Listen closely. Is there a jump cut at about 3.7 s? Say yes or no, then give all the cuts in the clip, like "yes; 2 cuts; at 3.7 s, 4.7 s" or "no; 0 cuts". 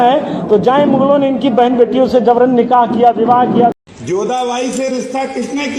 yes; 1 cut; at 3.7 s